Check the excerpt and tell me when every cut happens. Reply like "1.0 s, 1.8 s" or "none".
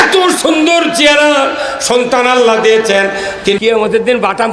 3.6 s